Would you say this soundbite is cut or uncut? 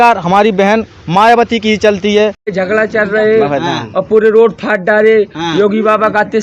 cut